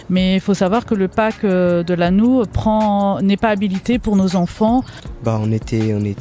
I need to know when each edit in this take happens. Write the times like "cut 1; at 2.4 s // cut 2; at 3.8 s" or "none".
cut 1; at 5.0 s